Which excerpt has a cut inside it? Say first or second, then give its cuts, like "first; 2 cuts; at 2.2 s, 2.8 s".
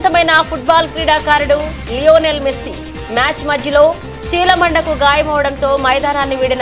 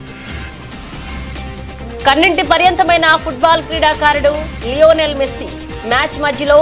second; 1 cut; at 1.0 s